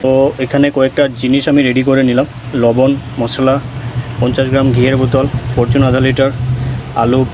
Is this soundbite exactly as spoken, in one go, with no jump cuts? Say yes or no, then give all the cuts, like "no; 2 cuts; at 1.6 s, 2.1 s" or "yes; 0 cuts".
yes; 0 cuts